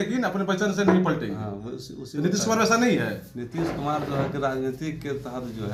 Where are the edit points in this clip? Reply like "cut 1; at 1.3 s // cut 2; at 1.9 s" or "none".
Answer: none